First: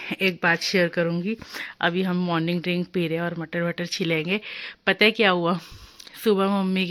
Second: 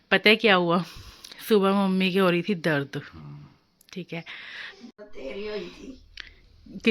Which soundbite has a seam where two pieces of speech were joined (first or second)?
second